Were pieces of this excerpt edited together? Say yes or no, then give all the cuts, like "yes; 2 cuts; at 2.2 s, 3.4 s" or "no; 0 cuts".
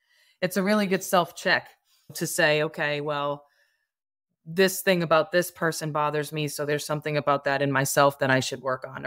yes; 1 cut; at 2.1 s